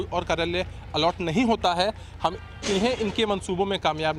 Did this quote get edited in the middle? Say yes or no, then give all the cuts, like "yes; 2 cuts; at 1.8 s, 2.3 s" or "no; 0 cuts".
no; 0 cuts